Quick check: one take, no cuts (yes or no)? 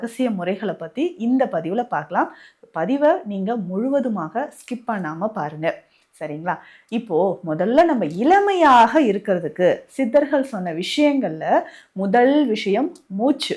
yes